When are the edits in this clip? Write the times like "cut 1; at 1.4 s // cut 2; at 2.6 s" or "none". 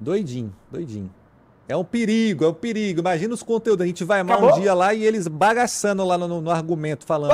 cut 1; at 5.3 s